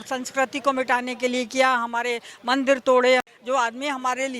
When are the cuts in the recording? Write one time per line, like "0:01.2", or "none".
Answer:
0:03.3